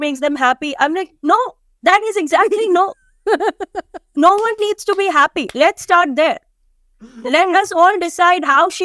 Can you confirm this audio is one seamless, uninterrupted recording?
yes; 0 cuts

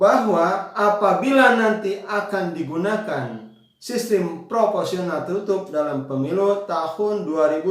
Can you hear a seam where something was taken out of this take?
no; 0 cuts

